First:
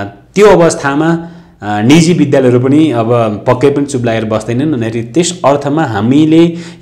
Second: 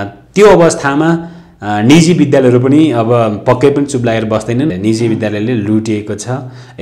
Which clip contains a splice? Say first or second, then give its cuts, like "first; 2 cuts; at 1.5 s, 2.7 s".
second; 1 cut; at 4.7 s